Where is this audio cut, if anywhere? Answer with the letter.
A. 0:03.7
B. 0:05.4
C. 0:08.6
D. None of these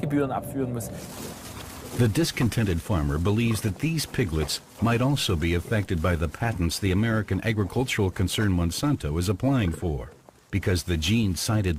A